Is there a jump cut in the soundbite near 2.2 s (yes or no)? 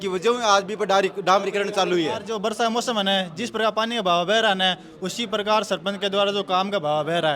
yes